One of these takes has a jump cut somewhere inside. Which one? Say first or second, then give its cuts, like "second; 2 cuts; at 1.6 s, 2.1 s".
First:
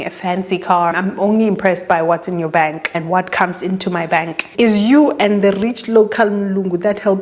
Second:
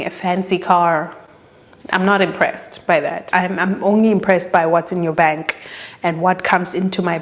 first; 3 cuts; at 0.9 s, 2.9 s, 4.4 s